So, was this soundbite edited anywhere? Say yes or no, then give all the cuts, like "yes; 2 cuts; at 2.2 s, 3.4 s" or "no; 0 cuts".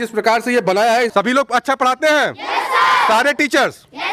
yes; 1 cut; at 1.1 s